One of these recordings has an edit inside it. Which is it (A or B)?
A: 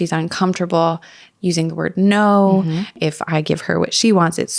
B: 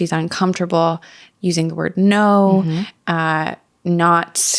A